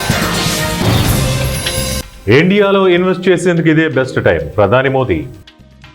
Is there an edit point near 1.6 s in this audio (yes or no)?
yes